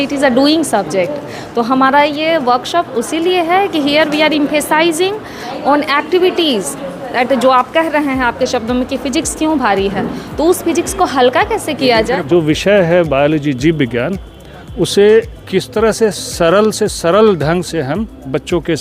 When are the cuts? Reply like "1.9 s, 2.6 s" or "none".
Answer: 12.2 s